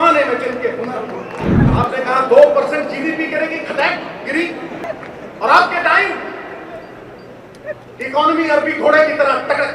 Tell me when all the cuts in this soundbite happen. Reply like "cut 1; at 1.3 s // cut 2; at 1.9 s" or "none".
cut 1; at 1.4 s // cut 2; at 4.8 s